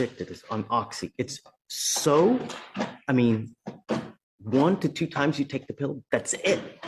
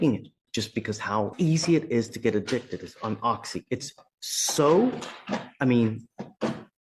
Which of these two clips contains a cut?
second; 1 cut; at 1.3 s

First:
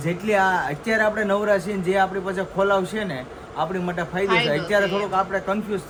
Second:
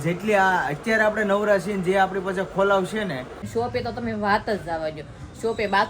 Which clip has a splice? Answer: second; 1 cut; at 3.4 s

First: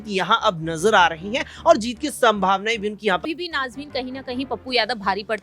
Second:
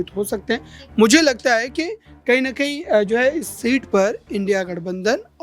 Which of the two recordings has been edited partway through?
first; 1 cut; at 3.2 s

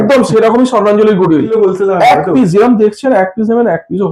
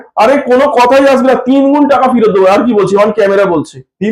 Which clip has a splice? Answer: first; 1 cut; at 1.5 s

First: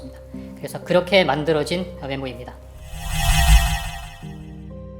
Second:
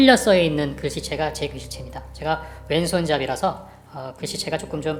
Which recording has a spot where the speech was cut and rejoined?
first; 2 cuts; at 2.8 s, 4.1 s

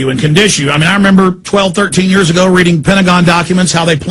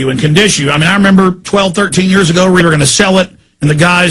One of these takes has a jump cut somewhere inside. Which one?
first; 1 cut; at 2.6 s

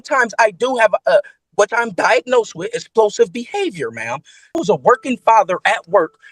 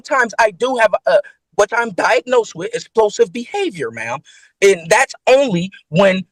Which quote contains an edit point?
first; 1 cut; at 4.6 s

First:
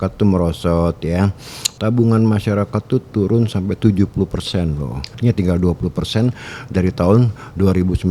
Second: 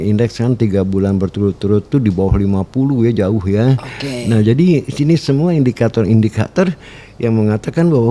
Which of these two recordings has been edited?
first; 2 cuts; at 1.6 s, 5.1 s

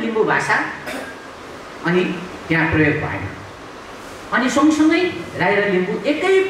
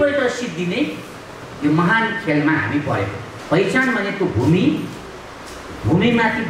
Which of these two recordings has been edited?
second; 1 cut; at 3.3 s

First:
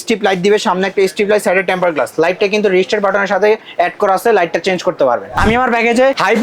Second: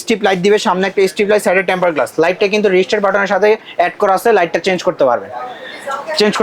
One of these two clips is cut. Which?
first; 1 cut; at 5.4 s

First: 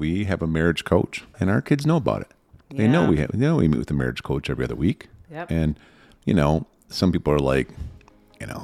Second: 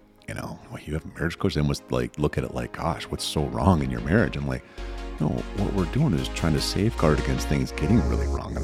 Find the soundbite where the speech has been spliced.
first; 1 cut; at 1.4 s

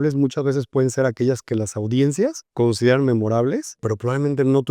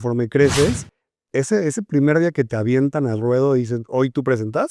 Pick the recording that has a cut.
first; 2 cuts; at 2.4 s, 3.8 s

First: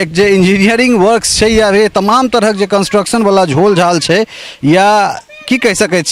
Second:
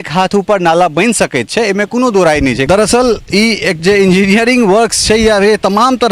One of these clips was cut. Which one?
second; 1 cut; at 2.6 s

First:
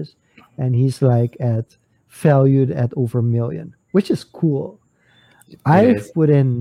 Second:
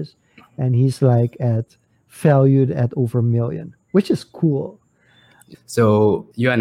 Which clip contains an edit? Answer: second; 1 cut; at 5.5 s

